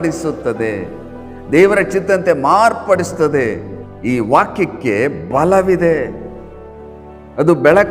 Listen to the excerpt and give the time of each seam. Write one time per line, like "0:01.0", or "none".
0:03.7